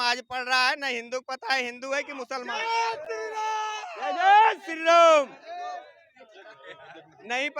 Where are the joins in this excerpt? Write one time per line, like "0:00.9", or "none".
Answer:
none